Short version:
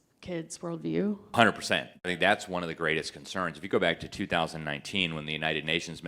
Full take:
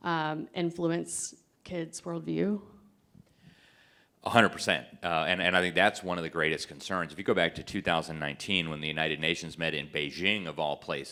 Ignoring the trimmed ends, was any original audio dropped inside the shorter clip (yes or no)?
yes